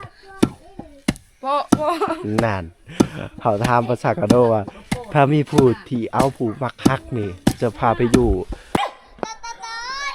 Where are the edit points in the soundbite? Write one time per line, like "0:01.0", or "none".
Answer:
0:08.8